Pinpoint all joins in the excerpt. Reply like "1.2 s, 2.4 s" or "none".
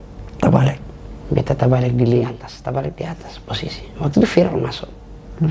2.5 s